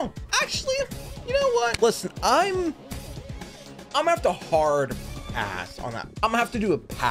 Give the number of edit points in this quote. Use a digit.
2